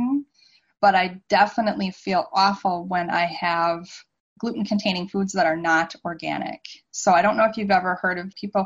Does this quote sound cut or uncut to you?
uncut